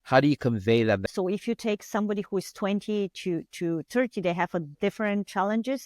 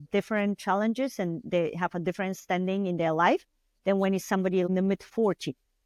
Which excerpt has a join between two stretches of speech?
first; 1 cut; at 1.0 s

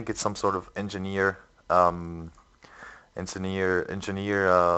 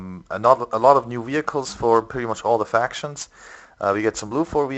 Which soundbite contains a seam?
second; 1 cut; at 1.7 s

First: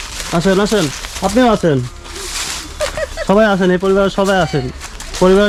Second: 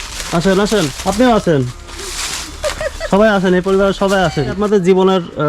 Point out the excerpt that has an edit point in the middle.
second; 2 cuts; at 0.9 s, 4.6 s

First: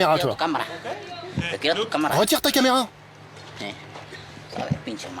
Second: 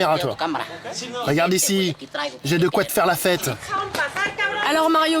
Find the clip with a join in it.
second; 2 cuts; at 1.0 s, 3.6 s

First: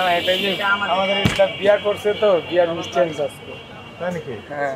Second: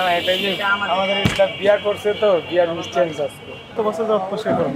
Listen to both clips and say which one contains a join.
second; 1 cut; at 3.8 s

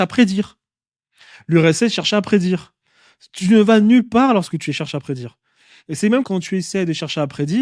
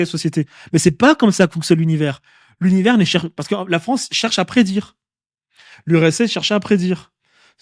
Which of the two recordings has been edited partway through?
first; 1 cut; at 6.3 s

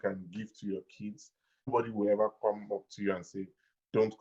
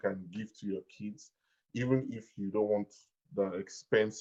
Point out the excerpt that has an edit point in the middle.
first; 1 cut; at 1.7 s

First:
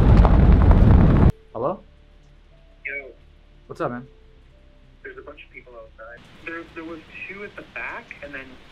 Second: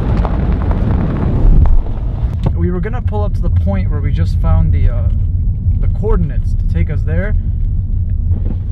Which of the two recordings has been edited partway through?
first; 2 cuts; at 1.3 s, 6.3 s

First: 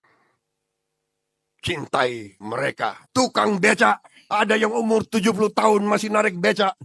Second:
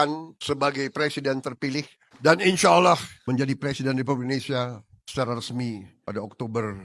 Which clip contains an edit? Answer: second; 2 cuts; at 2.0 s, 3.1 s

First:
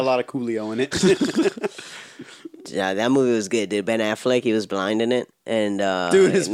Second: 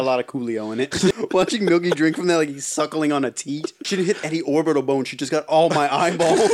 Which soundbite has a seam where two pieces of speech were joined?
second; 2 cuts; at 1.1 s, 3.8 s

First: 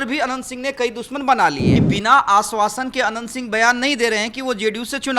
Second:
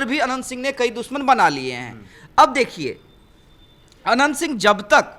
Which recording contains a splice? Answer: first; 1 cut; at 1.7 s

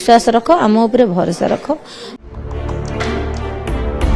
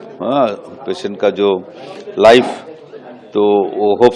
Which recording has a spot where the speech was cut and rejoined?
first; 1 cut; at 2.3 s

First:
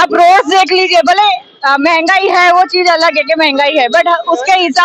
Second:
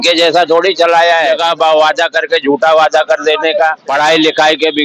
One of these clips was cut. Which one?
second; 2 cuts; at 1.4 s, 3.8 s

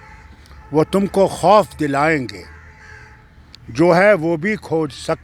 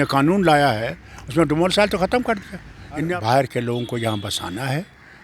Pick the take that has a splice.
second; 1 cut; at 3.0 s

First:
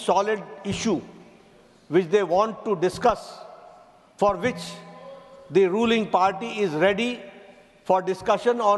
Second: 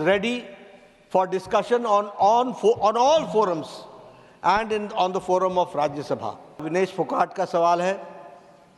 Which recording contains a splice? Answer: second; 1 cut; at 6.6 s

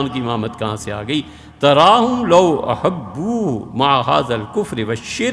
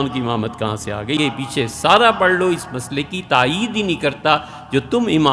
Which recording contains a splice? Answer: second; 1 cut; at 1.2 s

